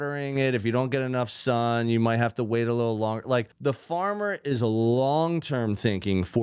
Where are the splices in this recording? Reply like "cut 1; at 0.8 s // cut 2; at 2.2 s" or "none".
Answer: cut 1; at 3.5 s